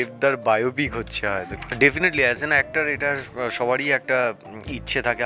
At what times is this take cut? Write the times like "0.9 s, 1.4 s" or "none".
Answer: 1.5 s